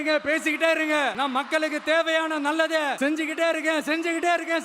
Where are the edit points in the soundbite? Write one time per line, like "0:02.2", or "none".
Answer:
0:01.1
0:02.9